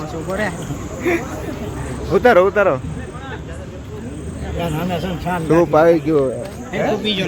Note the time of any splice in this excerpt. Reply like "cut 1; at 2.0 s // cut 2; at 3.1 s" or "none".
none